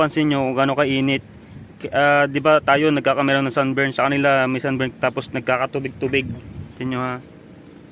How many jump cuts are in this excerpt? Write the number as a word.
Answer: zero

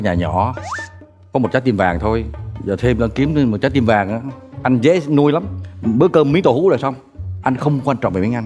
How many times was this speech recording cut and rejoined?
zero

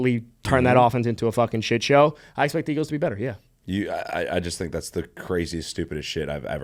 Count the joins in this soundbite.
zero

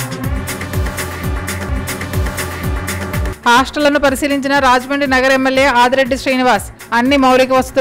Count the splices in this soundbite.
zero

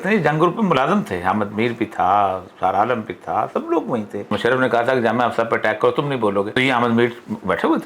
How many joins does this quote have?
two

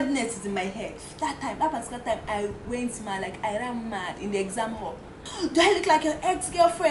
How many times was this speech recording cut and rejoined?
one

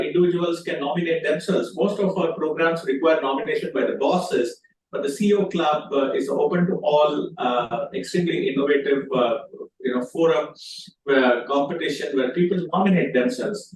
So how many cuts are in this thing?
zero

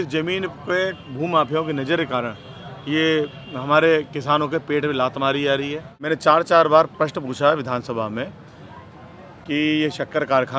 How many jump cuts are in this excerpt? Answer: one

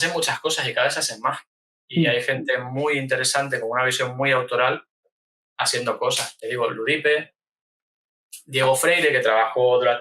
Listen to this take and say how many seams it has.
zero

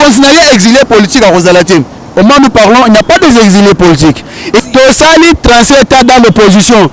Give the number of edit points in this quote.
one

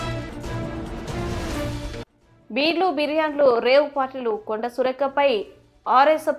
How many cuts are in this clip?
one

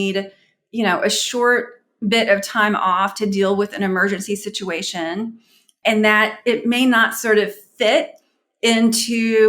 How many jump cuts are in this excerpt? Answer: one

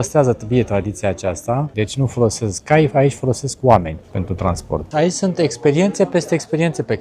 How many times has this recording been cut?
two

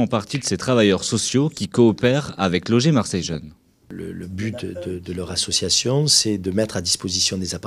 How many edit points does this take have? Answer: one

